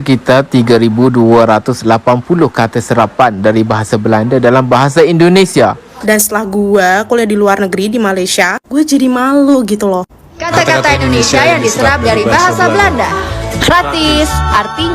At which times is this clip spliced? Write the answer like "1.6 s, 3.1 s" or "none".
5.9 s, 10.5 s